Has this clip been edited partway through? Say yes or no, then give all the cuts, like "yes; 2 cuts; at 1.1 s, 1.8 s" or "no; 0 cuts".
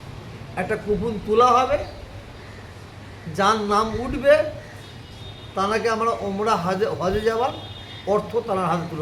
no; 0 cuts